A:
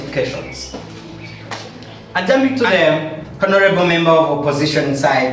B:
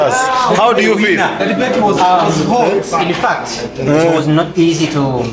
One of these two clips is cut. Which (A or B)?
A